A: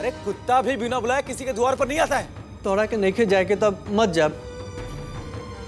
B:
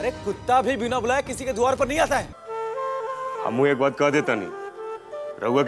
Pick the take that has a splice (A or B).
B